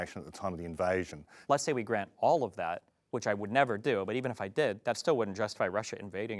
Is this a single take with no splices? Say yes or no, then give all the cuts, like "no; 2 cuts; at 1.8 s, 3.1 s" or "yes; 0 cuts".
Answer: no; 1 cut; at 1.3 s